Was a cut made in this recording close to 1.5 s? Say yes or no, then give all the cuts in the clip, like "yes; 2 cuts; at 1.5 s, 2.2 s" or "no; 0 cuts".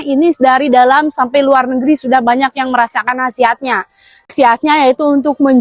no; 1 cut; at 4.3 s